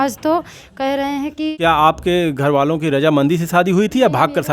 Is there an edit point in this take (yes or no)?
yes